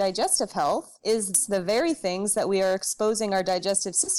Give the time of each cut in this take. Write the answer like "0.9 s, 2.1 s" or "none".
1.4 s

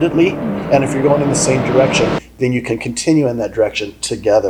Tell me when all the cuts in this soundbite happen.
none

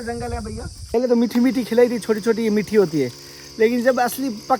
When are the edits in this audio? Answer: 0.9 s

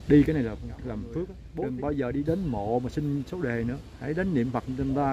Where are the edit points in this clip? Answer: 1.4 s

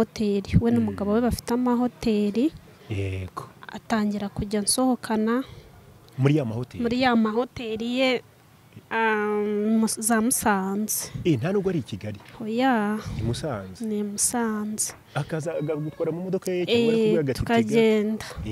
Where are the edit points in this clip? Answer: none

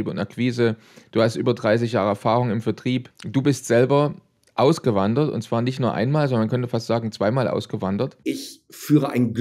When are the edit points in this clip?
3.1 s, 8.2 s

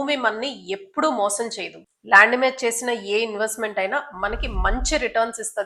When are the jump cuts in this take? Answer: none

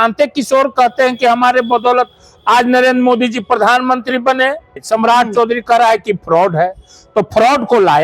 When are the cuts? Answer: 4.8 s

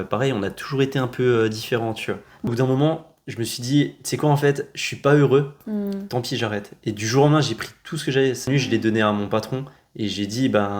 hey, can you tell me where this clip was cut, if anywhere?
2.4 s, 8.4 s

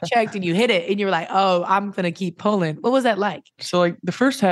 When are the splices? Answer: 3.6 s

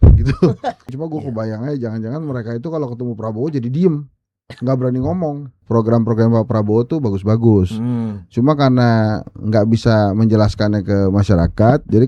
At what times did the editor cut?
1.0 s, 5.5 s

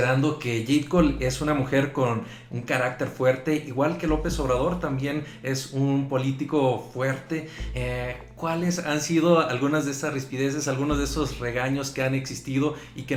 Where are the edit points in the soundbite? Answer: none

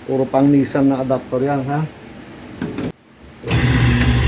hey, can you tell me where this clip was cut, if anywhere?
2.9 s

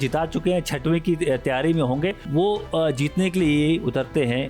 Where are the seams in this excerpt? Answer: 2.2 s

